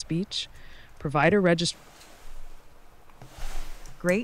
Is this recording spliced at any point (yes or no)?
yes